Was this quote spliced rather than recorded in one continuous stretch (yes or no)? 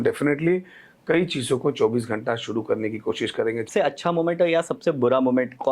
yes